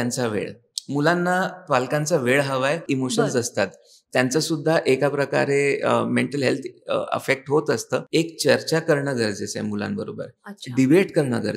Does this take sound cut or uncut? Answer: cut